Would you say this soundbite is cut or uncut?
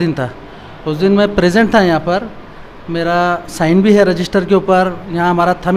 uncut